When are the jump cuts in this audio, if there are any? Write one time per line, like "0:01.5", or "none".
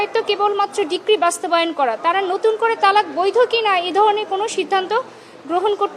none

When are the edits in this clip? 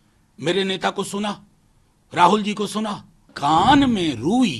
0:03.3

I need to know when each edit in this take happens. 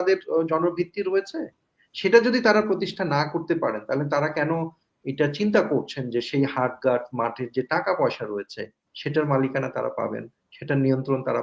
none

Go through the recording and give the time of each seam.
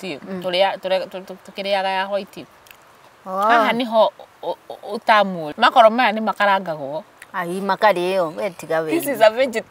0:05.4

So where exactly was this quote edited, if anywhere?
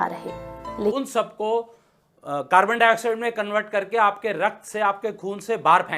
0:01.0

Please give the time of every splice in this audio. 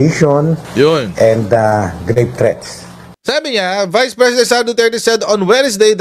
0:03.1

